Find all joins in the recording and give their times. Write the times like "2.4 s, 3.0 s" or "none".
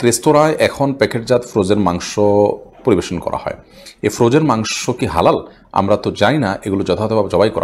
none

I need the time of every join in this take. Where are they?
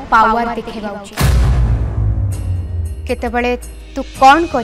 2.8 s

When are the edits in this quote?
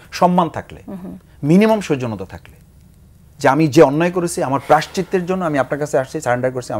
none

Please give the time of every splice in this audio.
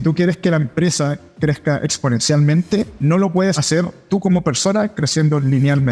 2.9 s

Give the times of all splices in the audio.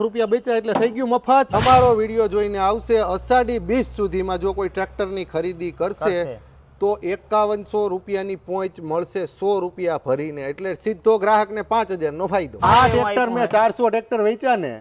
1.5 s, 12.6 s

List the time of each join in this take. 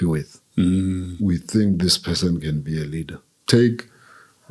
3.3 s

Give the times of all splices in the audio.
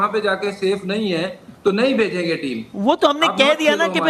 none

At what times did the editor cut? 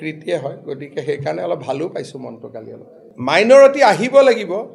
3.1 s

